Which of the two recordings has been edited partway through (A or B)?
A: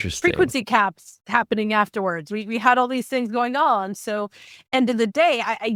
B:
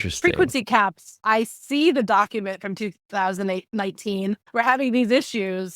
B